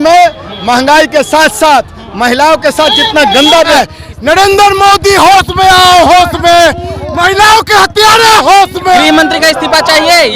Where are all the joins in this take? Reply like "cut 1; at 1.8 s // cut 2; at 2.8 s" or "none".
cut 1; at 3.7 s // cut 2; at 9.0 s